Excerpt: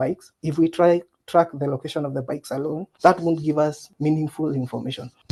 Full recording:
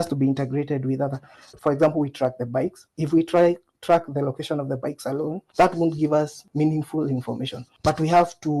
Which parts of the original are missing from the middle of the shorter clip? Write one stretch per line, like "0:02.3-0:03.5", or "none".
none

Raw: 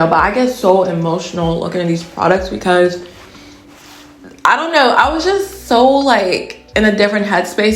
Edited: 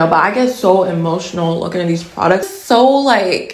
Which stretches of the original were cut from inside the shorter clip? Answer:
0:02.5-0:05.5

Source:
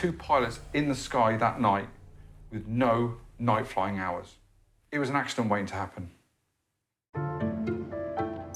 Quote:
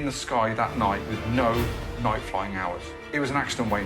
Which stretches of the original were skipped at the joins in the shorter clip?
0:02.0-0:02.6
0:04.4-0:04.7

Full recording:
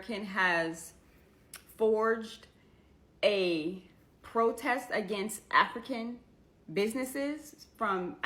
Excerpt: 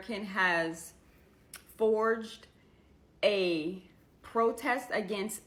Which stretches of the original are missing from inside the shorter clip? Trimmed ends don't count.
none

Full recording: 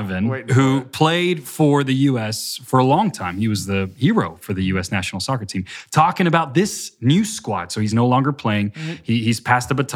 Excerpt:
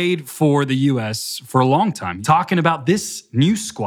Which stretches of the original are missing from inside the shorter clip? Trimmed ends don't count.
0:03.3-0:05.8

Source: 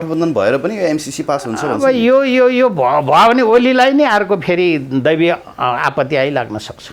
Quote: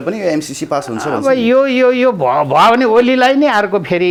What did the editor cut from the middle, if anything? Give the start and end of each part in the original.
none

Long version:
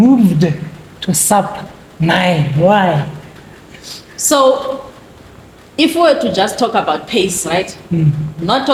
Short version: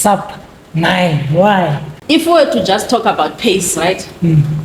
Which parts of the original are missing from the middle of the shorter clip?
0:03.1-0:05.6

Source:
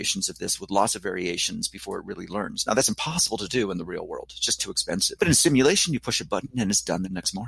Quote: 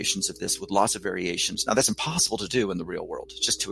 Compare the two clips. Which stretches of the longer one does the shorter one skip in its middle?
0:01.6-0:02.6

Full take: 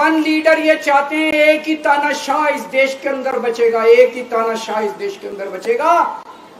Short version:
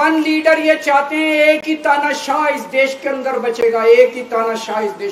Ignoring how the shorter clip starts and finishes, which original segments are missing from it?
none

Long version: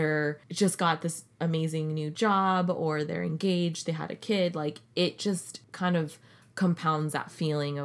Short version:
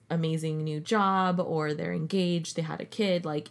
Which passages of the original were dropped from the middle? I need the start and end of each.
none

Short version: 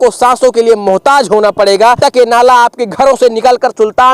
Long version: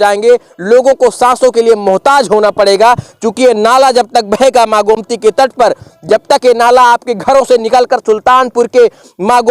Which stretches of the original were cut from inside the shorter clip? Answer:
0:03.0-0:06.3

